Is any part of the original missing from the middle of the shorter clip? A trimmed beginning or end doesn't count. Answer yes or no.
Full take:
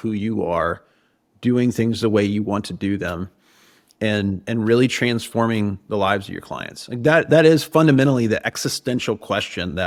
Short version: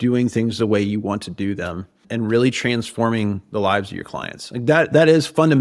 yes